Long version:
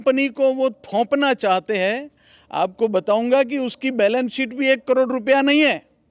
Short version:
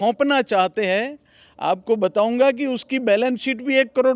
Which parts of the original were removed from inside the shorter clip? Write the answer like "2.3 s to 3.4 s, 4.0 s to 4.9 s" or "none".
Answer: none